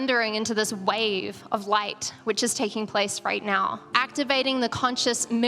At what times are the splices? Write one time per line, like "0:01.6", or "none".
0:03.9

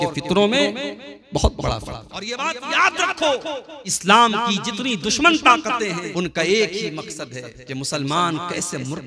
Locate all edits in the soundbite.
0:02.3
0:04.0
0:06.1

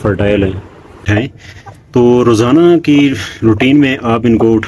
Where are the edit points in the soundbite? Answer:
0:01.1

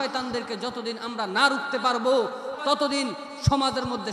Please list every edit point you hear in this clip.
0:02.5

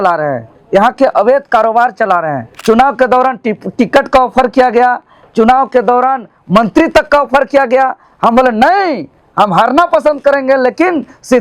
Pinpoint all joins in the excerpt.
0:02.5

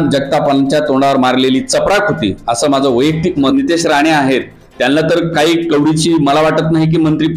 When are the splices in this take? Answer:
0:03.5

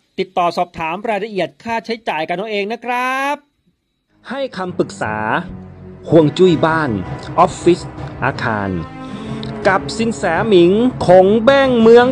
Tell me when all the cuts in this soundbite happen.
0:04.3

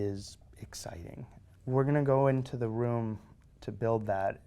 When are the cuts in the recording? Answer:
0:01.4

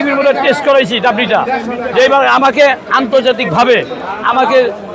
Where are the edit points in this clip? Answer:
none

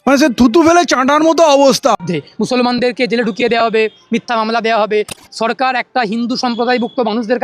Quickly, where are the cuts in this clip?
0:02.0

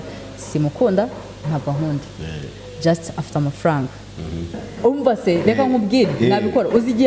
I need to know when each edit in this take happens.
0:04.6

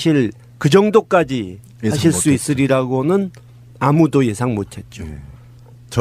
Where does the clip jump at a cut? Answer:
0:03.3

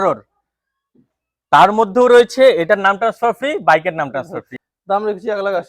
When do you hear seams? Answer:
0:04.4

